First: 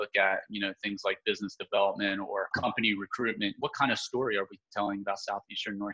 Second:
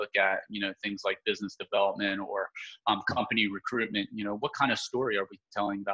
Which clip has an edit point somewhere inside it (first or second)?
first